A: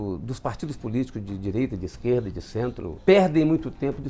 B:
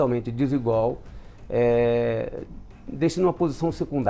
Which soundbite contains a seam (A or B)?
A